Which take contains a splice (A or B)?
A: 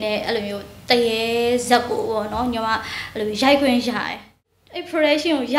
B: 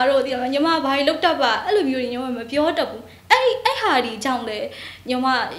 A